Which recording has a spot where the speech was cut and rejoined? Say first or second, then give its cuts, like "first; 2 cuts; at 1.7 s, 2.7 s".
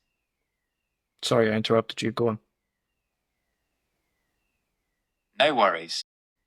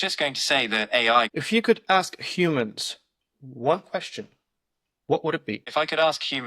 second; 2 cuts; at 1.3 s, 5.6 s